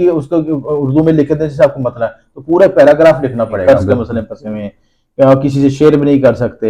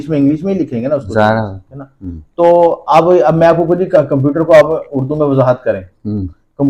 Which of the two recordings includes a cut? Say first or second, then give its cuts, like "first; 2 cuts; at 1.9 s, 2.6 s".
first; 1 cut; at 3.6 s